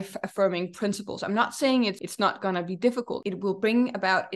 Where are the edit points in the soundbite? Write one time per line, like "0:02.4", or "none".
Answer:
0:02.0
0:03.2